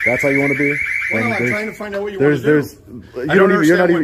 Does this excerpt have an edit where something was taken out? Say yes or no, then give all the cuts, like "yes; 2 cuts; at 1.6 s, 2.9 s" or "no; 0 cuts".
no; 0 cuts